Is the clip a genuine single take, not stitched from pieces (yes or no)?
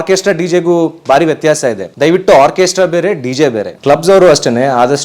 no